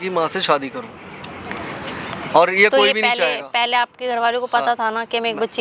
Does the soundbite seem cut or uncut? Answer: uncut